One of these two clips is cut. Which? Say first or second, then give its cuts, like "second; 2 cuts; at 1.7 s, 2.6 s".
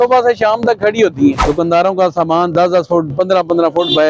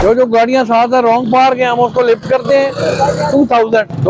first; 1 cut; at 1.4 s